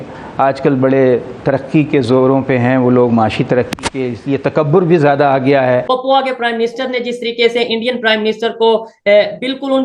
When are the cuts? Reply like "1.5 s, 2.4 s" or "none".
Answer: 5.8 s